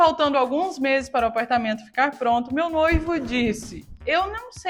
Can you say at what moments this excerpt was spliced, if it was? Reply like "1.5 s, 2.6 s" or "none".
none